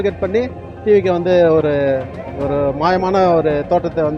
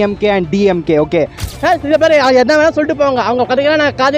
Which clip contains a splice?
second; 1 cut; at 1.5 s

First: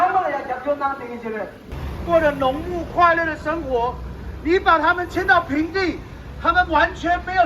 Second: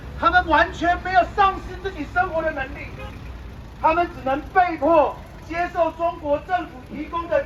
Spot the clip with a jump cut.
first; 1 cut; at 1.6 s

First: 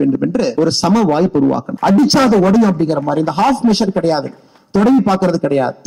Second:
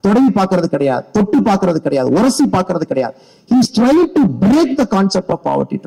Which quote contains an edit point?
first; 1 cut; at 1.7 s

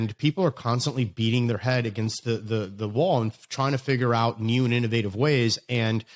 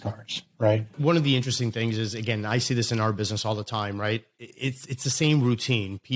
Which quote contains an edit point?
second; 1 cut; at 1.0 s

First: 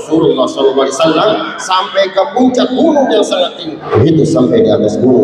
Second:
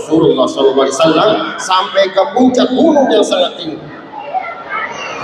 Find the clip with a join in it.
first; 1 cut; at 3.8 s

